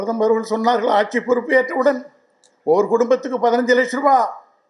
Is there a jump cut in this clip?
no; 0 cuts

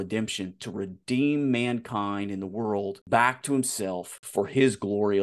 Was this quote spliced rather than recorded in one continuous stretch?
yes; 2 cuts; at 3.0 s, 4.2 s

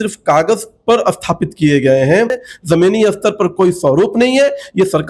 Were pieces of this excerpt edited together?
yes; 1 cut; at 2.5 s

